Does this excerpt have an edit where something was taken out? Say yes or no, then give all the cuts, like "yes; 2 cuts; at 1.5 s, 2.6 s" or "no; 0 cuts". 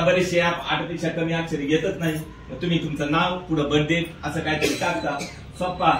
no; 0 cuts